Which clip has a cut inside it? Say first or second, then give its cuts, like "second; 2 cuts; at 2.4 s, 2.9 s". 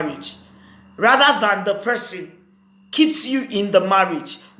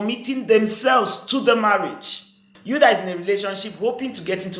second; 1 cut; at 2.5 s